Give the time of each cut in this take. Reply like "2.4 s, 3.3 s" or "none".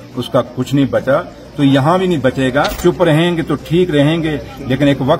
2.7 s